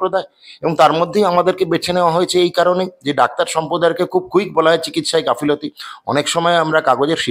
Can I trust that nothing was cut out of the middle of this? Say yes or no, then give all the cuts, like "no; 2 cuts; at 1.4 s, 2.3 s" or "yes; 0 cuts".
yes; 0 cuts